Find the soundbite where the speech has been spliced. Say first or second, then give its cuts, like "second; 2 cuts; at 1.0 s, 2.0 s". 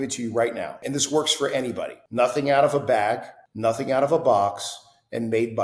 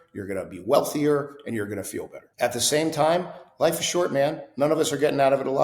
first; 2 cuts; at 0.8 s, 2.0 s